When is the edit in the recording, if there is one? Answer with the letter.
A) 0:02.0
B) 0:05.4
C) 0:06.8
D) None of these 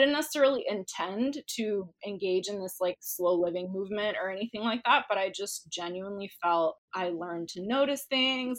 C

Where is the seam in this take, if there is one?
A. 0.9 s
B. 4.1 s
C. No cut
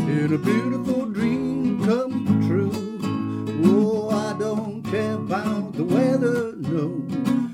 C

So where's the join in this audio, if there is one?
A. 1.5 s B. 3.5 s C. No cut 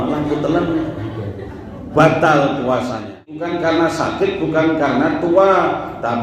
B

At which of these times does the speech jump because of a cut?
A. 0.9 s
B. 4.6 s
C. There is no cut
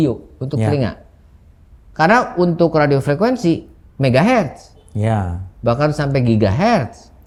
C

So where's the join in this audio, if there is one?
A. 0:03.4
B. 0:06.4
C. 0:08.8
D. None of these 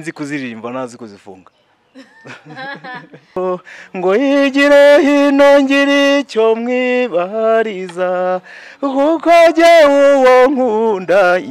A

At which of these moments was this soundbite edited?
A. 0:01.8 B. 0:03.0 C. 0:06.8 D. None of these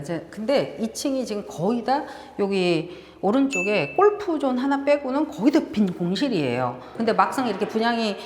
C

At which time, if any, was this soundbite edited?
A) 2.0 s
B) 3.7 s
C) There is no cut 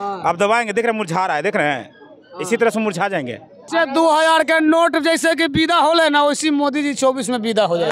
B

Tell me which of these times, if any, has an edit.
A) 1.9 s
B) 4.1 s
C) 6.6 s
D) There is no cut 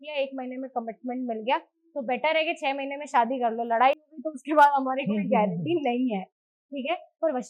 D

